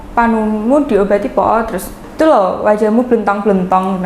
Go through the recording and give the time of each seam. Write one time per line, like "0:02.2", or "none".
0:02.0